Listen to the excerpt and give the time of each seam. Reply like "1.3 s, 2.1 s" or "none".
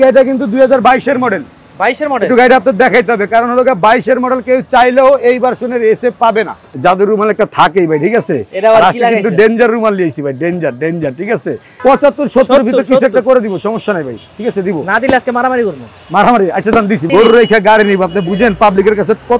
6.6 s, 11.7 s, 17.0 s